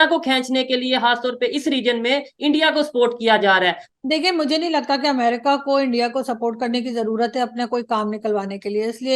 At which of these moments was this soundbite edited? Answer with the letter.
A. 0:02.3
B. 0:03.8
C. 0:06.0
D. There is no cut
B